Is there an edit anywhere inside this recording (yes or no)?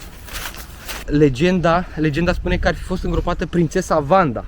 yes